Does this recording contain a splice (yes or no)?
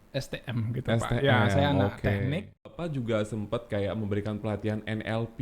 yes